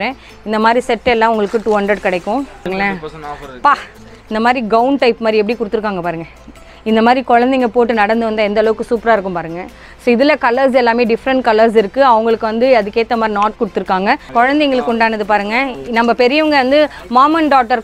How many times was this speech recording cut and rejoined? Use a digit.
2